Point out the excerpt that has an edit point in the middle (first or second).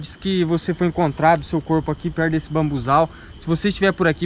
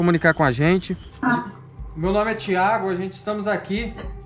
second